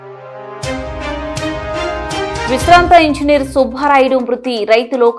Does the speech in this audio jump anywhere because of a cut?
yes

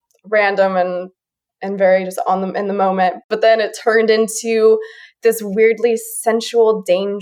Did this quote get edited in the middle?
yes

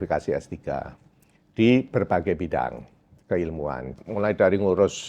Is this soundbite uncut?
no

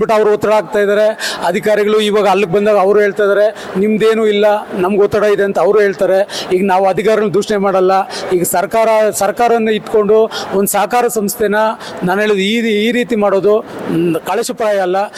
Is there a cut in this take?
no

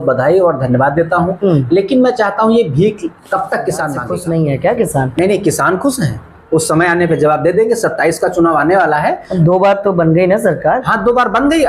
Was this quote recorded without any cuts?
no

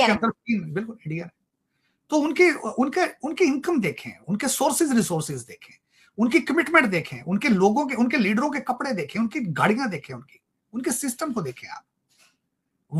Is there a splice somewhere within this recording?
no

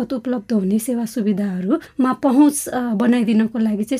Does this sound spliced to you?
yes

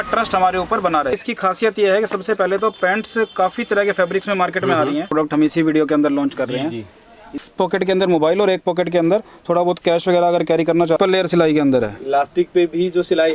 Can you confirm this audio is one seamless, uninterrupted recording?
no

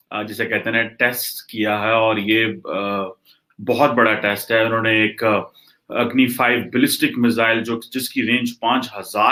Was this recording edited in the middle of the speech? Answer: no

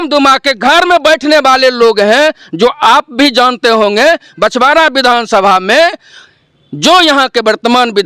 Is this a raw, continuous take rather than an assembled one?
yes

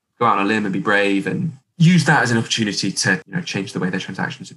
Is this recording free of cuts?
no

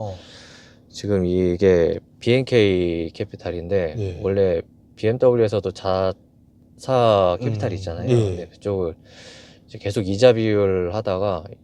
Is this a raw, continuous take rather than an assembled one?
yes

